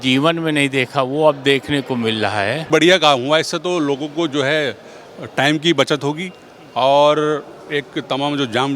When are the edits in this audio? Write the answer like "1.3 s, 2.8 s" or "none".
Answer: 2.7 s